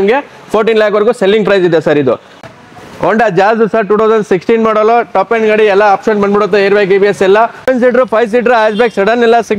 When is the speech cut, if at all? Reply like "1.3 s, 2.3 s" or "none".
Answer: 2.4 s, 7.7 s